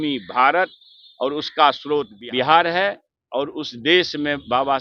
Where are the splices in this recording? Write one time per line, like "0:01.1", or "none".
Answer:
0:02.2

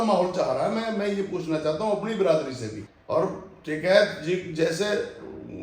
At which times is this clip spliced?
0:02.9

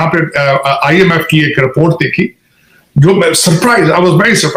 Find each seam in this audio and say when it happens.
none

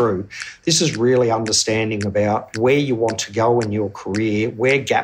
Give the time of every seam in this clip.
0:02.5

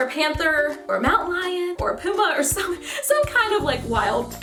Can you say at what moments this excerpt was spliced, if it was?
none

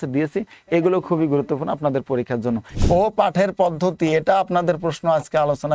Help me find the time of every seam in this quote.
0:02.7

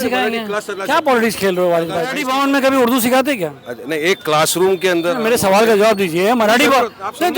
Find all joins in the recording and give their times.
0:02.2

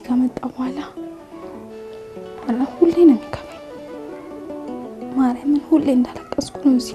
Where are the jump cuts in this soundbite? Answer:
0:00.9
0:02.4
0:03.3
0:05.1

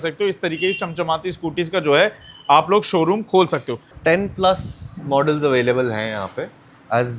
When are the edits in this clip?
0:03.9

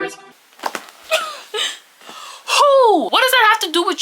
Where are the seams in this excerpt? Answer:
0:03.1

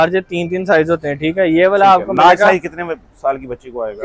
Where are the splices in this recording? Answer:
none

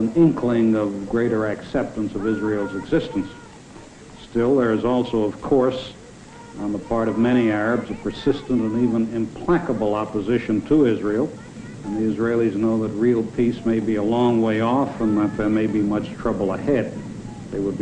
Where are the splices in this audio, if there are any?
0:05.6

